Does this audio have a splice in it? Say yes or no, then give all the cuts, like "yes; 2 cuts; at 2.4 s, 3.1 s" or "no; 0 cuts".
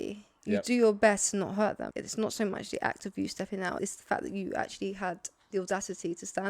yes; 2 cuts; at 1.9 s, 3.8 s